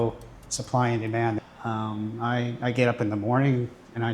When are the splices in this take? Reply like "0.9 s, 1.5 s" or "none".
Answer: 1.4 s